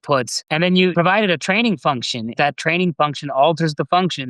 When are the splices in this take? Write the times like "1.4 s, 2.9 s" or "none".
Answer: 0.9 s, 2.3 s